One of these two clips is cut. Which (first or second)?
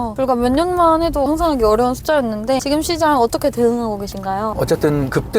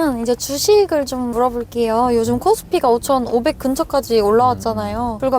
first